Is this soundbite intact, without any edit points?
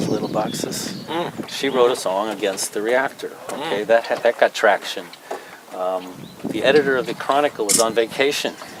yes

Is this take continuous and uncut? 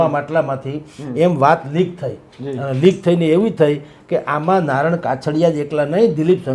yes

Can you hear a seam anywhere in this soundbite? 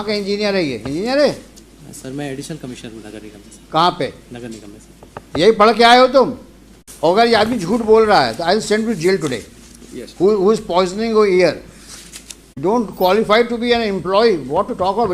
yes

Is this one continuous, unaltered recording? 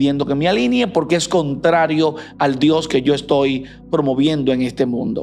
yes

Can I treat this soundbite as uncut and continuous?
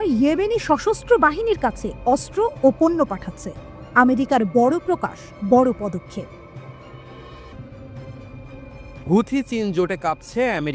no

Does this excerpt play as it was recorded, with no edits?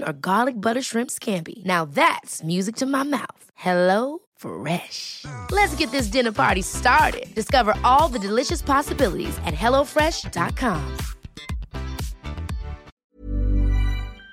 no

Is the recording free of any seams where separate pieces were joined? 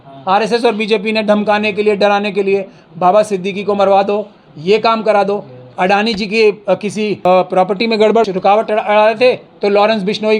no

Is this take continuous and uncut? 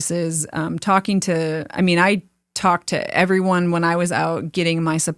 yes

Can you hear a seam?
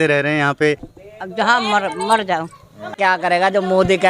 yes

